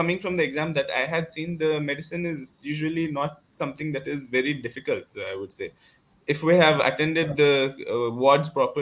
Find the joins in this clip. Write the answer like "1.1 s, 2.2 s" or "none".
none